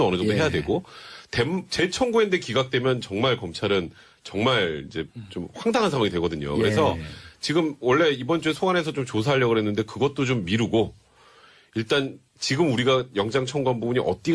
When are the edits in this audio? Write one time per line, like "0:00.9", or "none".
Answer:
0:09.0